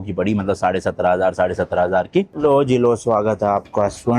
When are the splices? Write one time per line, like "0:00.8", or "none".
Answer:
0:02.3

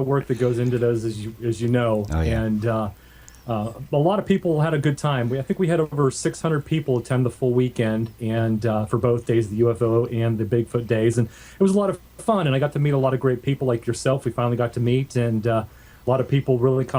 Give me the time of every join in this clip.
0:08.3

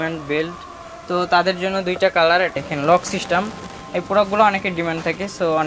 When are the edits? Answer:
0:02.5

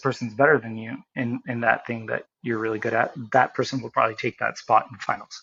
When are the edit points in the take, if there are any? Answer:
none

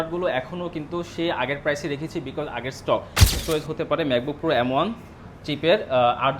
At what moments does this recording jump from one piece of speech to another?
0:03.4

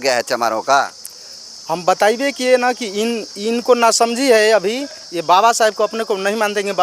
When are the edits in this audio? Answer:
none

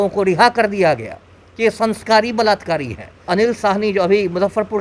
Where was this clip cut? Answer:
0:03.3

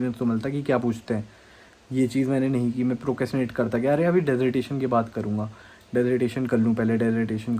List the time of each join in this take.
none

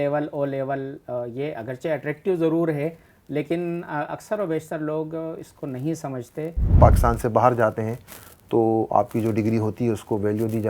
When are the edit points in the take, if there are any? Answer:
0:06.7

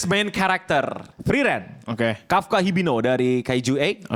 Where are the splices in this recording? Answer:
0:01.1

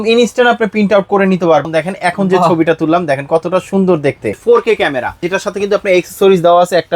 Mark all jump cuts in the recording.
0:01.7
0:04.4
0:05.2

